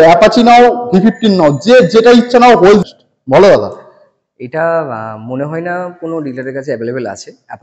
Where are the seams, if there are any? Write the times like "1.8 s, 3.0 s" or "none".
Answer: 2.8 s